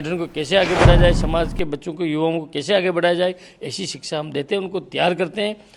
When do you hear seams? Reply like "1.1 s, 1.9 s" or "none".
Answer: none